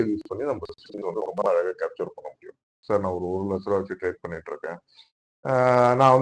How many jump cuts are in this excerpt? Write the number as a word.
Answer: one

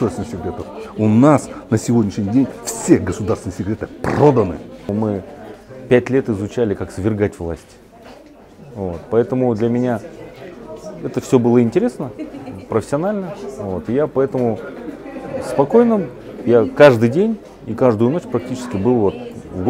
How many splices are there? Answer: one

